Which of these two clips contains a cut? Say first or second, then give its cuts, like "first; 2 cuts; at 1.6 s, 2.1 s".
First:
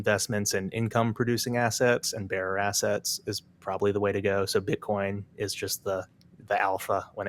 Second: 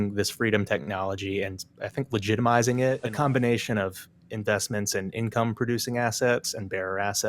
second; 2 cuts; at 1.6 s, 3.0 s